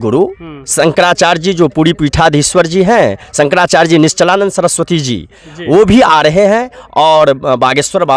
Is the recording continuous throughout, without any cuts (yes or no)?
yes